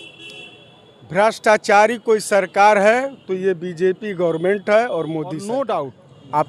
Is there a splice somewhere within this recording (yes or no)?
yes